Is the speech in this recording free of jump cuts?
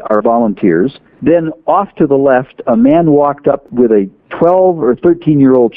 no; 2 cuts; at 1.1 s, 3.7 s

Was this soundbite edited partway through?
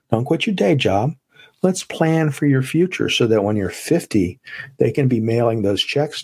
no; 0 cuts

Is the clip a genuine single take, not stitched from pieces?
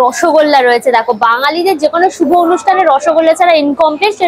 yes; 0 cuts

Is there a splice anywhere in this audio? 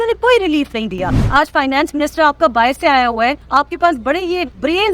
yes; 1 cut; at 1.2 s

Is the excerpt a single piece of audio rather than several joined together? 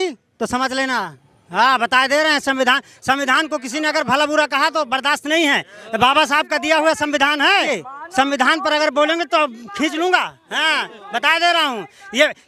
yes; 0 cuts

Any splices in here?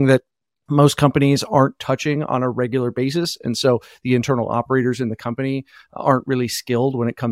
no; 0 cuts

